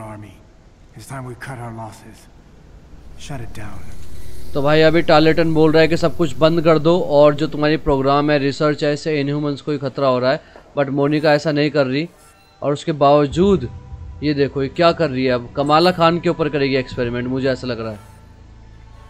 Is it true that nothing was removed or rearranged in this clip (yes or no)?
yes